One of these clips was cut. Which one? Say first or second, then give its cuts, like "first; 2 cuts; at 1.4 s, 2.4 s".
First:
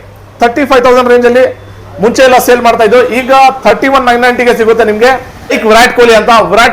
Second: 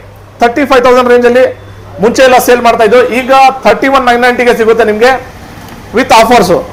first; 1 cut; at 5.6 s